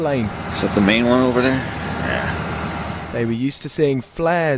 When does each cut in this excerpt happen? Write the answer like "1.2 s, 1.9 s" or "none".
1.8 s